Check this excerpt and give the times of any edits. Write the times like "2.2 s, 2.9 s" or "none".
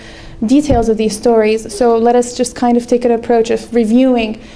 none